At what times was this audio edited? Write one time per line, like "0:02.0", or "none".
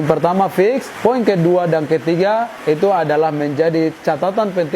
0:00.9
0:02.5